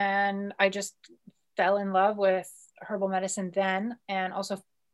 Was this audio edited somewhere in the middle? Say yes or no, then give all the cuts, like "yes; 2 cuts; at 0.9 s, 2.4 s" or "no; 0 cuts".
no; 0 cuts